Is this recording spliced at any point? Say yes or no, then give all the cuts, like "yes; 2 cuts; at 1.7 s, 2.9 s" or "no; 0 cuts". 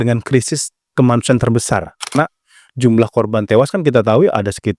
yes; 1 cut; at 2.1 s